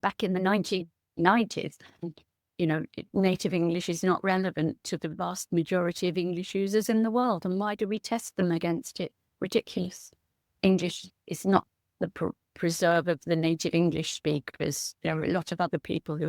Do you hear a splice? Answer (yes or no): yes